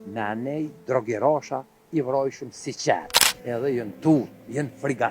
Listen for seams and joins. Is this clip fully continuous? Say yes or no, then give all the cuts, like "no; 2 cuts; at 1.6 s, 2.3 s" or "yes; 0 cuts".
no; 1 cut; at 3.2 s